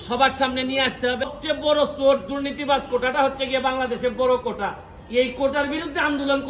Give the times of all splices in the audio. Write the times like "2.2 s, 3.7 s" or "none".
1.3 s

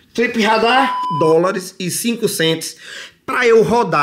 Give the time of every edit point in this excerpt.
1.0 s

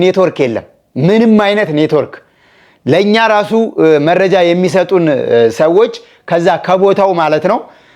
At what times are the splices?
none

